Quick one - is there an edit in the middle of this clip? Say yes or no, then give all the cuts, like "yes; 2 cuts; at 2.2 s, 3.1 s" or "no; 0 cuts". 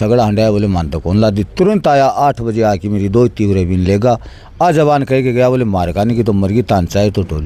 no; 0 cuts